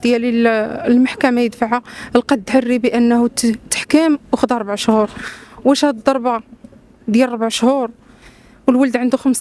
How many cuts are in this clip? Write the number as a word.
zero